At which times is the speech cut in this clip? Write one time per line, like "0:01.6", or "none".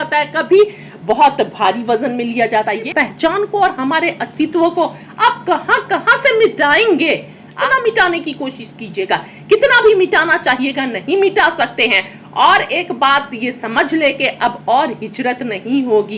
0:02.8
0:07.6